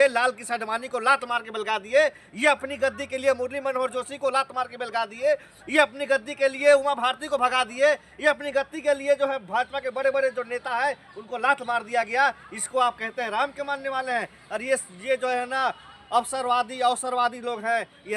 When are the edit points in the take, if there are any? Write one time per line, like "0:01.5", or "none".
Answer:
none